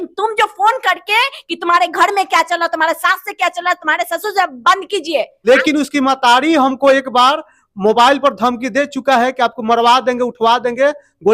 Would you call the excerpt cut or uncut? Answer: cut